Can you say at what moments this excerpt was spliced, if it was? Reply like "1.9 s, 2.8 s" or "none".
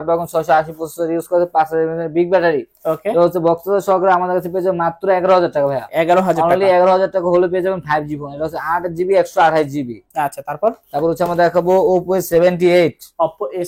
none